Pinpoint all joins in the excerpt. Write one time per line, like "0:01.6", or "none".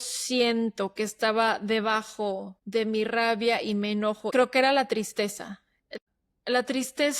0:02.5
0:04.2
0:05.9